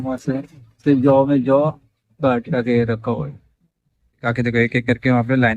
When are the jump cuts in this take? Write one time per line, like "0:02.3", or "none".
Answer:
0:04.3